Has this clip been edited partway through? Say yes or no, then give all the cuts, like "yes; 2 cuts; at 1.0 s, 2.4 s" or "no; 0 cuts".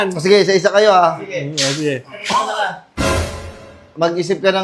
no; 0 cuts